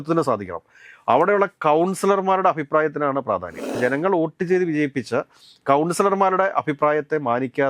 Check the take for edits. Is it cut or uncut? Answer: cut